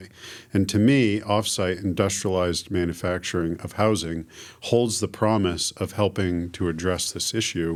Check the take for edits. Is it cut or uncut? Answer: uncut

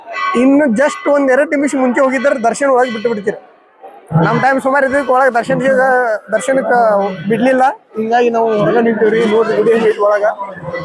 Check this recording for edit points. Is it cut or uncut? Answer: uncut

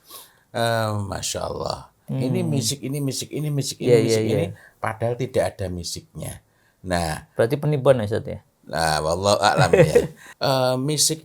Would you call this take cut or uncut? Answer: cut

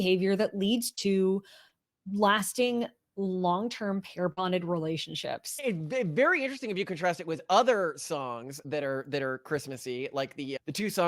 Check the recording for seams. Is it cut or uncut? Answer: cut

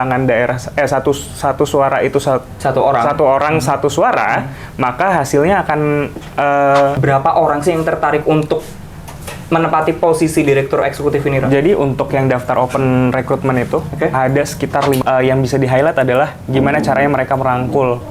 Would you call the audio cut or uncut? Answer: cut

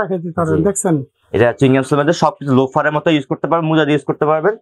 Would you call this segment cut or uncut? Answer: uncut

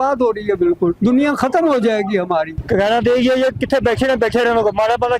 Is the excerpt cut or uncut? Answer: cut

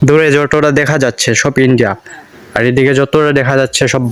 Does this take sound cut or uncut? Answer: uncut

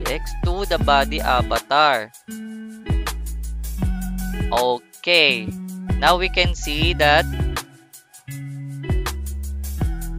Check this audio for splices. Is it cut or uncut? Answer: uncut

